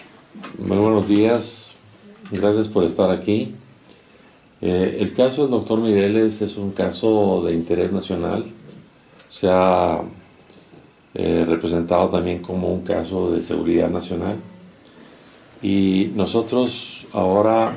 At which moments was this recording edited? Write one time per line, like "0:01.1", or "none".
0:12.5